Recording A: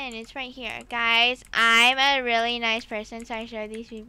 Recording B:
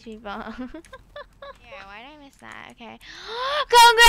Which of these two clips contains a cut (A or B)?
B